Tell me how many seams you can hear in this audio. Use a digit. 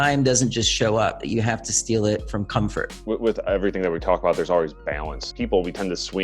1